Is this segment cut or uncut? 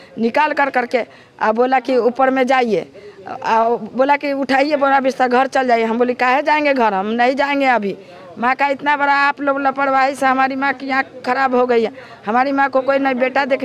uncut